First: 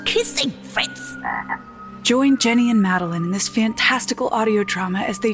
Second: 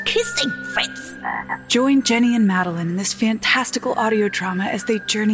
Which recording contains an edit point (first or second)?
second